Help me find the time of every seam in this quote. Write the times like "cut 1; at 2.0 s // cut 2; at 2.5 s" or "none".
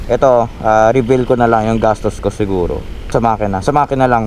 cut 1; at 3.1 s